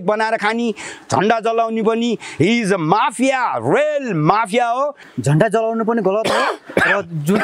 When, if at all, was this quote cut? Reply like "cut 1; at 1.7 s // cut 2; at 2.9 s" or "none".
cut 1; at 5.1 s